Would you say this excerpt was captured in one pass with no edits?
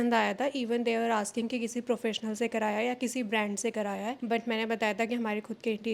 yes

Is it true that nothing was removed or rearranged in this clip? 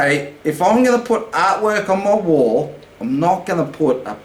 yes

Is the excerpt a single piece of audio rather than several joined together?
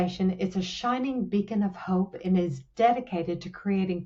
yes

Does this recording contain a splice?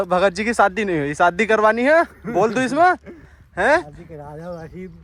no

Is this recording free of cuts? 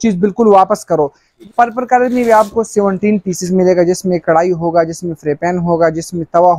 no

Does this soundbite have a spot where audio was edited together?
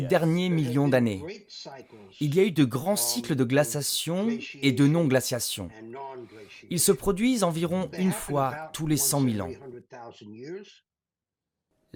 no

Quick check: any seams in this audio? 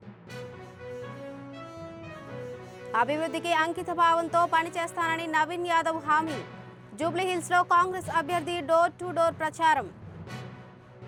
no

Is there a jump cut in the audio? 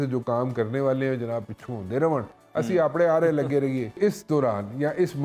yes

